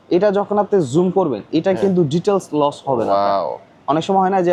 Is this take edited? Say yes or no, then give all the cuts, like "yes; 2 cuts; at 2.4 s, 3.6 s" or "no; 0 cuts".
no; 0 cuts